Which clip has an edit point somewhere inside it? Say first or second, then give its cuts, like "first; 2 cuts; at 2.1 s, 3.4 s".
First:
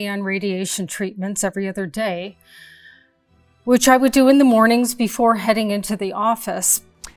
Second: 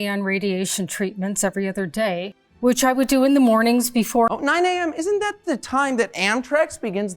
second; 2 cuts; at 2.4 s, 4.3 s